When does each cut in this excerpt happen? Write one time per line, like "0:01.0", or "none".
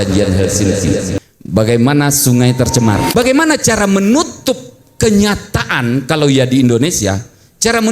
0:03.1

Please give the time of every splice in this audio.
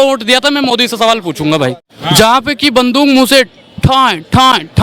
0:01.9

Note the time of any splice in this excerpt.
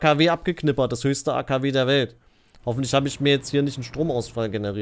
none

